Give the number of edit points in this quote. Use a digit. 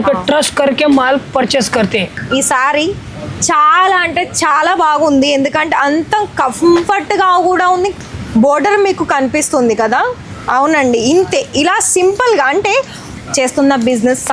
3